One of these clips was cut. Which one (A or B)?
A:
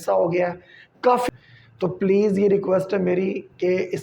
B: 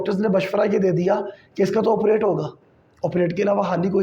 A